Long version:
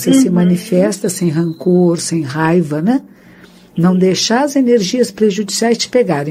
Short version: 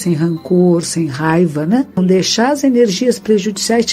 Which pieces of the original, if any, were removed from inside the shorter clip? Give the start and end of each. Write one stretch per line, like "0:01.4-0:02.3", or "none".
0:03.1-0:03.9